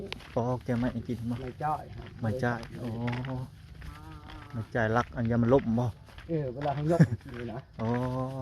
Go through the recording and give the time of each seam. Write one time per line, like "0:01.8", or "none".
none